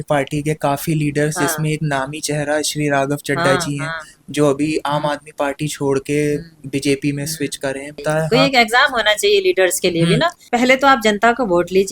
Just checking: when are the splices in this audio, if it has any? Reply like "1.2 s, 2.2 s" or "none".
8.0 s, 10.5 s